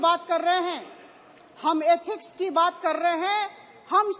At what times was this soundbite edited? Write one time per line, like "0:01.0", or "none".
none